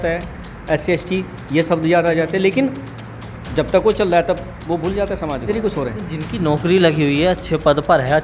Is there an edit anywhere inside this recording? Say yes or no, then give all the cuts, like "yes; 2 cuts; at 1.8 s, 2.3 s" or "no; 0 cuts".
yes; 1 cut; at 5.5 s